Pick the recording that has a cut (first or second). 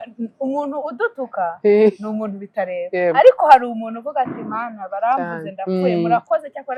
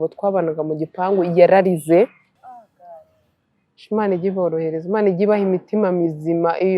second